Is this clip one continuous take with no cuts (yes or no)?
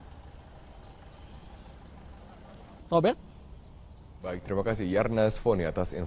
no